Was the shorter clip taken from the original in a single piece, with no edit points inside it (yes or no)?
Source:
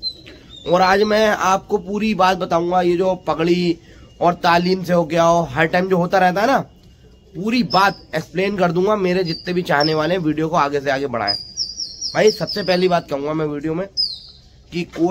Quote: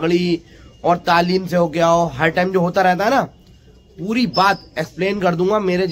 yes